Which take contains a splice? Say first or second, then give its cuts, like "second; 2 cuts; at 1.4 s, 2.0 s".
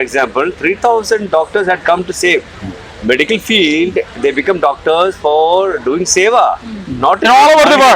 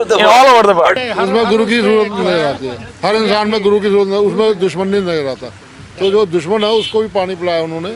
second; 1 cut; at 1.0 s